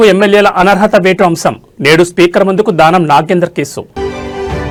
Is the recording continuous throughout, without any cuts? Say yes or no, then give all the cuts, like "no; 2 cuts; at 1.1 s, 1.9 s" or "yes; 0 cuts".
yes; 0 cuts